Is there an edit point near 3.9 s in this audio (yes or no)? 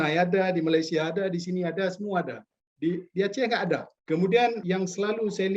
yes